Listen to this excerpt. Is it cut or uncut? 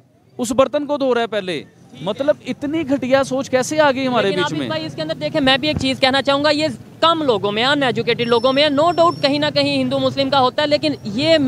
uncut